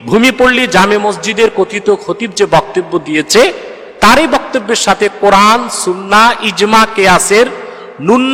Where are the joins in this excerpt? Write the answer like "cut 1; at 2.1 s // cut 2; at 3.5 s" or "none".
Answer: none